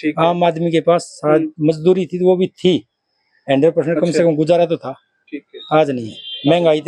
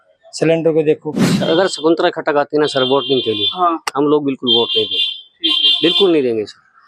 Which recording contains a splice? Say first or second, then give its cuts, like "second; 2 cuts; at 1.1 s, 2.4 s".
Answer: second; 1 cut; at 1.3 s